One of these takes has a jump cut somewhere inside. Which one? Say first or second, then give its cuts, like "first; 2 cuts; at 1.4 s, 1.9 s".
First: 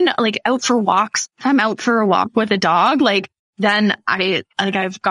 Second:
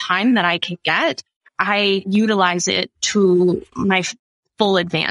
first; 1 cut; at 1.2 s